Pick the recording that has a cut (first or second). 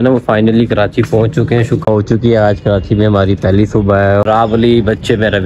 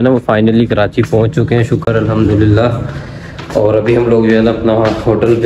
first